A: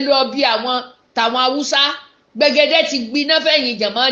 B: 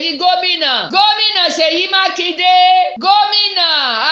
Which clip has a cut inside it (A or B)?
B